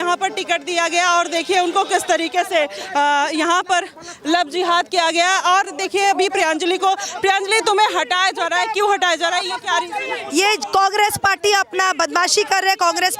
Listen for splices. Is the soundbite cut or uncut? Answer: uncut